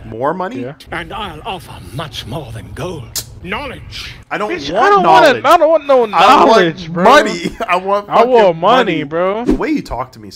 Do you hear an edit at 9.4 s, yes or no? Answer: yes